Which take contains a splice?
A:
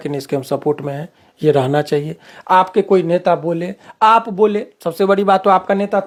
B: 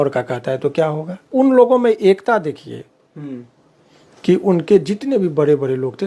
B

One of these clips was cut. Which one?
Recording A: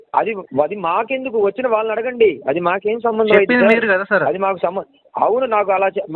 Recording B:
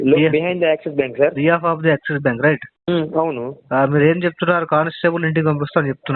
B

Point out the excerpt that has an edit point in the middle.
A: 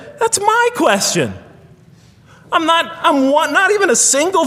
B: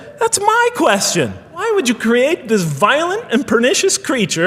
B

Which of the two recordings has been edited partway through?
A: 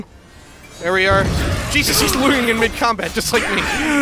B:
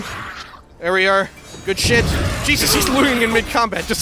A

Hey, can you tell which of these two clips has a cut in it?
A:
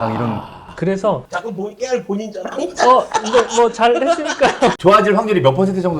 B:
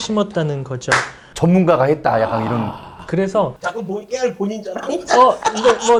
A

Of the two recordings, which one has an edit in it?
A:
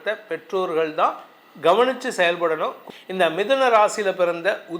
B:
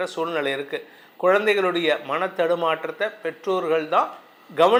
A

